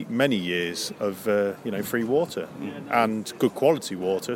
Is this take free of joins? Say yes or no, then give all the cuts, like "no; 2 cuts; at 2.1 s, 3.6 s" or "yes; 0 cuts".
yes; 0 cuts